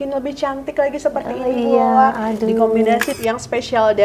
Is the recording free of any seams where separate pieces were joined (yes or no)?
no